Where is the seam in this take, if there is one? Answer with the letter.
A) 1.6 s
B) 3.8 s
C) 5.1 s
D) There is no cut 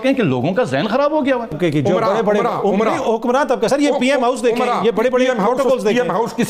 A